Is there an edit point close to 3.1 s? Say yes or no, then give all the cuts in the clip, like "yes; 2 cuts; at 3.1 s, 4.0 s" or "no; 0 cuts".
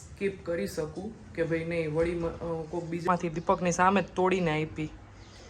yes; 1 cut; at 3.1 s